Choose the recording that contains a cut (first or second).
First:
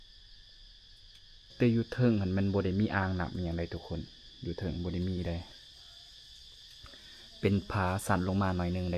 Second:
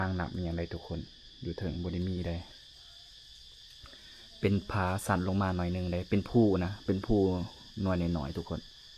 first